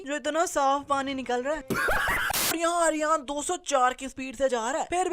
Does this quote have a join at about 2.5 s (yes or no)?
yes